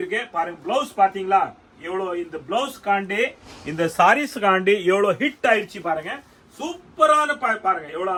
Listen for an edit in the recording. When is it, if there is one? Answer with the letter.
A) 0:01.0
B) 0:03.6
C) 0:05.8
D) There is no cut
D